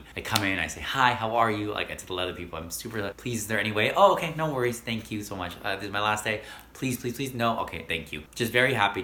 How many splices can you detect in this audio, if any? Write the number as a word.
zero